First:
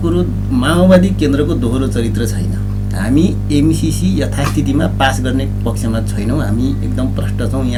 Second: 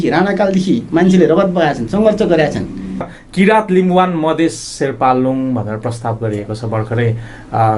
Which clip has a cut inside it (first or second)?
second